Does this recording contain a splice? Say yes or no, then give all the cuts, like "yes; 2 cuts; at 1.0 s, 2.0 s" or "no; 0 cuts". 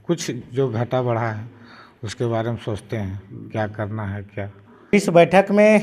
yes; 1 cut; at 4.9 s